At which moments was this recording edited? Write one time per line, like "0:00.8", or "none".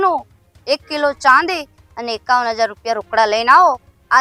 none